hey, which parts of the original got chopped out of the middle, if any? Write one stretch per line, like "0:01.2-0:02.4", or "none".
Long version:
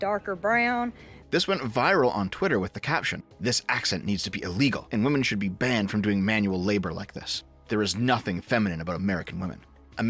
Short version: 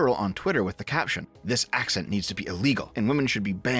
none